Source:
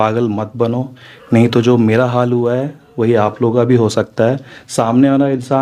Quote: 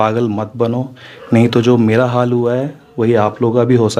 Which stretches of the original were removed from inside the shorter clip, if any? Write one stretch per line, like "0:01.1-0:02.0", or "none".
none